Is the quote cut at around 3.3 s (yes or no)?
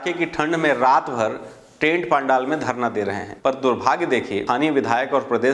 yes